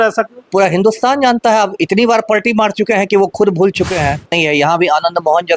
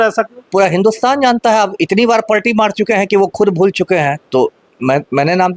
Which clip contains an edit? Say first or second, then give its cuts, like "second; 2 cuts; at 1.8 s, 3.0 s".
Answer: first; 1 cut; at 4.3 s